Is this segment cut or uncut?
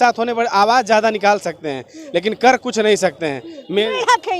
uncut